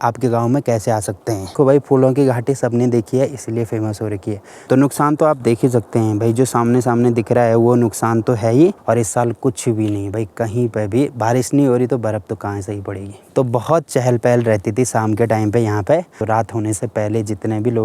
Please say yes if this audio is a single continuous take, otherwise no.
no